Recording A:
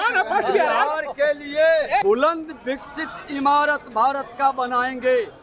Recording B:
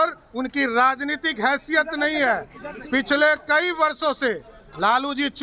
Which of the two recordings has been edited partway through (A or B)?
A